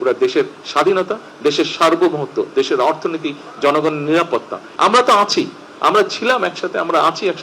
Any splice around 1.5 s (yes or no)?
no